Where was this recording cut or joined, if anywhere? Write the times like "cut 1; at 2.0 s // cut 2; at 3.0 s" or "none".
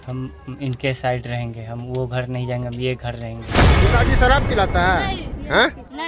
cut 1; at 3.7 s